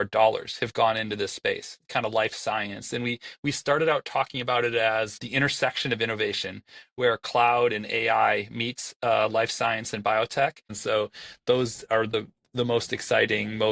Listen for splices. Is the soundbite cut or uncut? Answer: cut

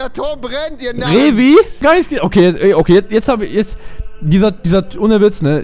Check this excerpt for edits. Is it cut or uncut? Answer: cut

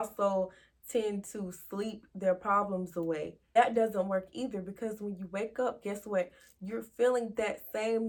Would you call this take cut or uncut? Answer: uncut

